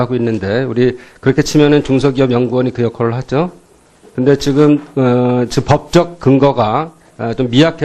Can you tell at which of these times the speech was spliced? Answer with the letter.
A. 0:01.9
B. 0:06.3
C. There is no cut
B